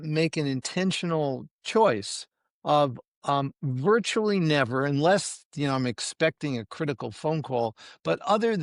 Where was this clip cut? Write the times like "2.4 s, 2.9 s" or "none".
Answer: none